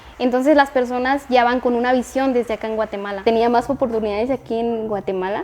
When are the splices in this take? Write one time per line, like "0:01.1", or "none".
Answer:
0:03.2